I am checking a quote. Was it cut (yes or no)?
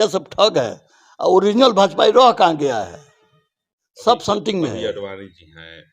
no